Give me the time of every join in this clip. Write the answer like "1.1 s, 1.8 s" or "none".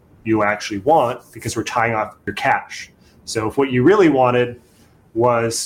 2.2 s